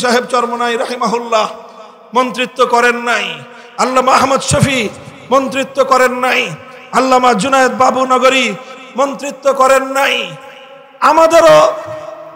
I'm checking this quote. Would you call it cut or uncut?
uncut